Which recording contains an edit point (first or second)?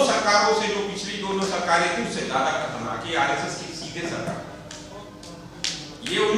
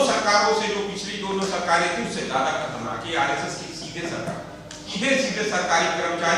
second